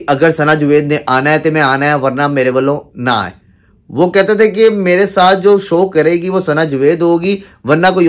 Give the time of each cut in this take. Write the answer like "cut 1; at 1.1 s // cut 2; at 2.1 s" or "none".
none